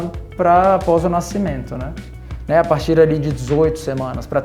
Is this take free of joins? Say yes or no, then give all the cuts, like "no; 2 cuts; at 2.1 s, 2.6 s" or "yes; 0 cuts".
no; 1 cut; at 2.0 s